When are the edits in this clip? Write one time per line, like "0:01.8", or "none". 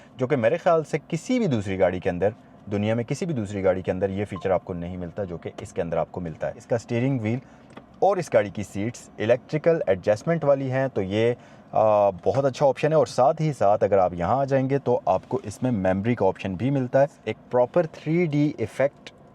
0:06.6
0:17.2